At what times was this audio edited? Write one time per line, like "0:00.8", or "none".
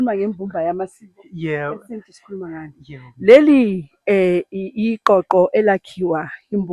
none